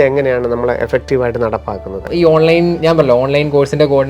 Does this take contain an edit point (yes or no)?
yes